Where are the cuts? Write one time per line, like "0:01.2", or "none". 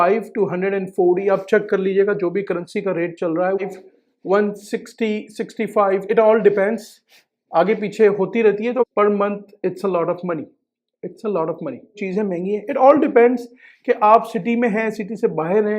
0:03.6
0:08.9
0:12.0